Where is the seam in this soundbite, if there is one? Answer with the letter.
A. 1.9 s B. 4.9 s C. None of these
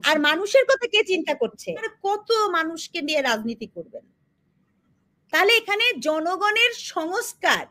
A